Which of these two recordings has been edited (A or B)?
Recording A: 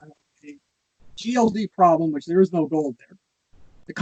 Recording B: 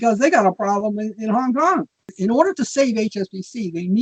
B